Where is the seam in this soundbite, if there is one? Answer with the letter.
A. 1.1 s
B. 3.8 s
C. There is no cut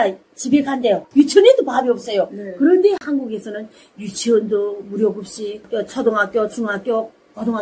A